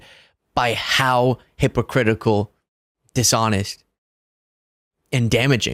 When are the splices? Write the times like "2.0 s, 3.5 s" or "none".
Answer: none